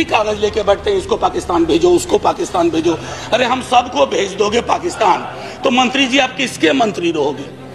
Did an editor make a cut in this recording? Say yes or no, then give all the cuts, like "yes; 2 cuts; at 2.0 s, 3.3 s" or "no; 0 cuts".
no; 0 cuts